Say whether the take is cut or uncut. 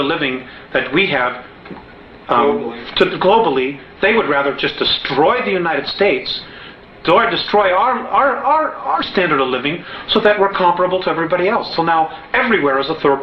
uncut